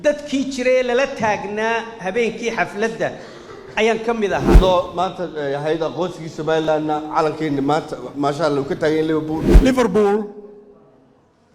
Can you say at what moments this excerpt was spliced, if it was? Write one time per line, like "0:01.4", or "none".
0:04.6
0:09.4